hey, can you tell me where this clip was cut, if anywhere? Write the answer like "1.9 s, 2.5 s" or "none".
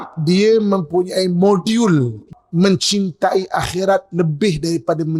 2.2 s

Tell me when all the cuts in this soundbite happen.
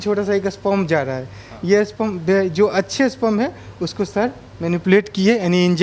none

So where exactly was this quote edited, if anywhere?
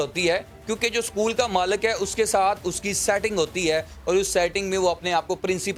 none

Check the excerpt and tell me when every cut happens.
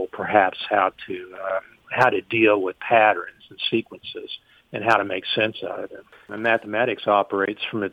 6.2 s

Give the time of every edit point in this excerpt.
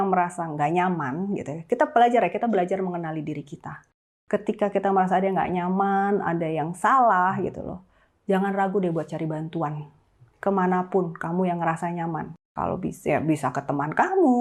none

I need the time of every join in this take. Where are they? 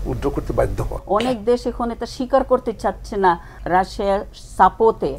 1.0 s

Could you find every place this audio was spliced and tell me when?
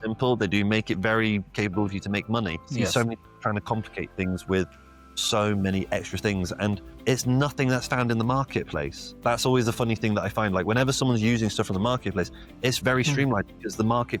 none

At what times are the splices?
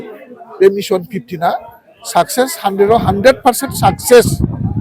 none

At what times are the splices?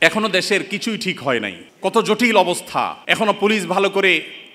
1.6 s, 3.0 s

